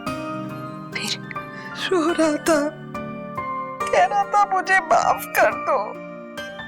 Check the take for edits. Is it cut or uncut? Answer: cut